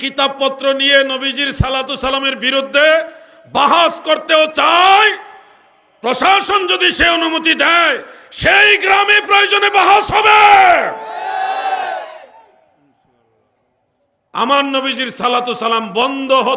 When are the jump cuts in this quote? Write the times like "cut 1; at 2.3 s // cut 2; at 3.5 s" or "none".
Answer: none